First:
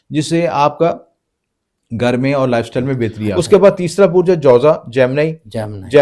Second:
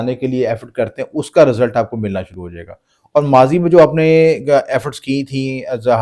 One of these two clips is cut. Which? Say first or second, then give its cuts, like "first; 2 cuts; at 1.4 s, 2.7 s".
first; 1 cut; at 3.3 s